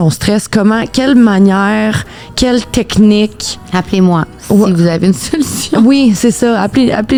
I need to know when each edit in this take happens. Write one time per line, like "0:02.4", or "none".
none

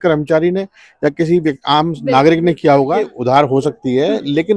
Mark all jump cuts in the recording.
0:03.1

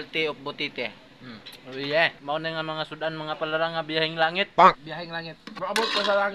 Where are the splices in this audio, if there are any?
0:02.2

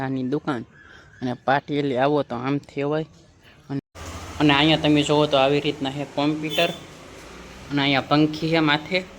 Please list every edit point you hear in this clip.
0:03.8

